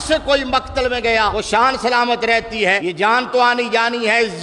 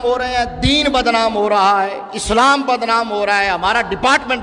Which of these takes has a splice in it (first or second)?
first